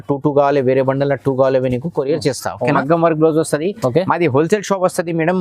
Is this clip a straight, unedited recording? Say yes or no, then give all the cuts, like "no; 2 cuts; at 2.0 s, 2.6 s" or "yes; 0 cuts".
no; 1 cut; at 2.8 s